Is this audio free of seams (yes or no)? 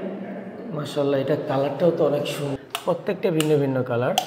no